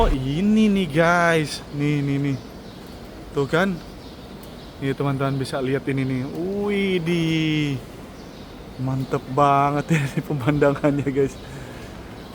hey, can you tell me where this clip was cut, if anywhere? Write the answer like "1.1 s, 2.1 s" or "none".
none